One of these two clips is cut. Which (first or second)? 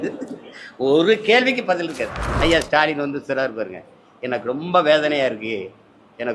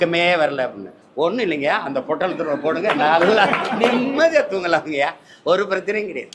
first